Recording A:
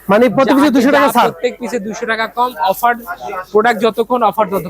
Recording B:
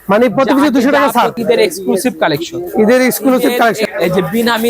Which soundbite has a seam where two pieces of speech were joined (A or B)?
B